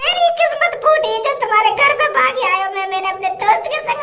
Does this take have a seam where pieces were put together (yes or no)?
no